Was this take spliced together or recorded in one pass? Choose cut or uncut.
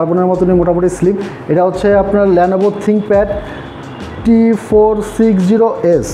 uncut